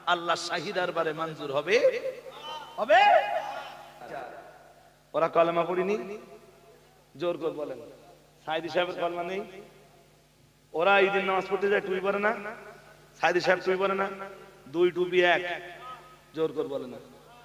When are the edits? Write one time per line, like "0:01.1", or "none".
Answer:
0:04.1